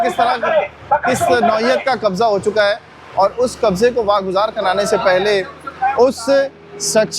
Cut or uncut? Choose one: uncut